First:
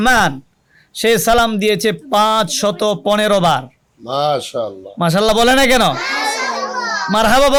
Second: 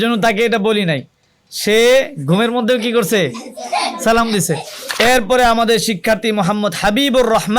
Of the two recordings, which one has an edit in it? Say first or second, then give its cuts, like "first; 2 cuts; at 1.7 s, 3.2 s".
second; 1 cut; at 4.8 s